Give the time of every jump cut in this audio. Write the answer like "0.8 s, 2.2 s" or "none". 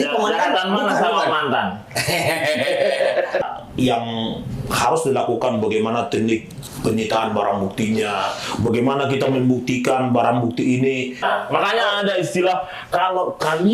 3.4 s, 11.2 s

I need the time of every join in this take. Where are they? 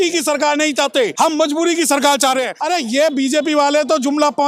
1.1 s, 2.6 s

